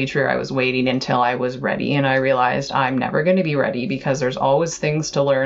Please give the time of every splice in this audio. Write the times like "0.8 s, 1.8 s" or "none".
none